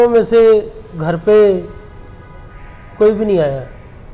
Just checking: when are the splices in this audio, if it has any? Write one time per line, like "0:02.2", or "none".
none